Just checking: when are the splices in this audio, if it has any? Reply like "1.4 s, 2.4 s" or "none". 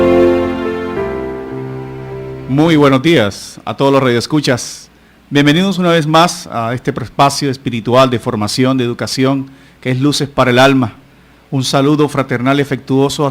2.4 s

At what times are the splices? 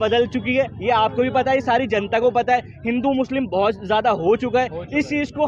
none

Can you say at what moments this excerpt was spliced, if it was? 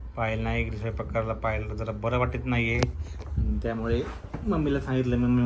none

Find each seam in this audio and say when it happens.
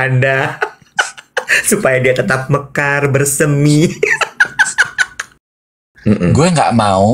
5.5 s

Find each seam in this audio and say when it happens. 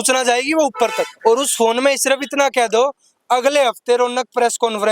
1.1 s

